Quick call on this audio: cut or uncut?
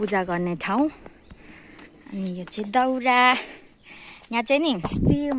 uncut